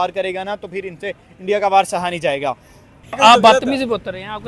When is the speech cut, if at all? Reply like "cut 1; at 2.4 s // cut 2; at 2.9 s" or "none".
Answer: cut 1; at 3.2 s